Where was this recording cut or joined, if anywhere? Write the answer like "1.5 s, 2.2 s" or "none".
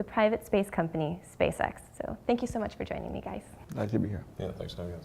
3.6 s